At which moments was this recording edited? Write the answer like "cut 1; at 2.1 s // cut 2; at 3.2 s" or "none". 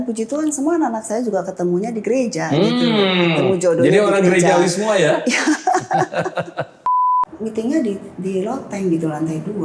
cut 1; at 7.1 s